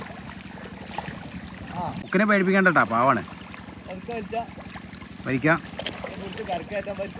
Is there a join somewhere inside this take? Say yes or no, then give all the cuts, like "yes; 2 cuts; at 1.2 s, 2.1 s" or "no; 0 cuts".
yes; 1 cut; at 2.0 s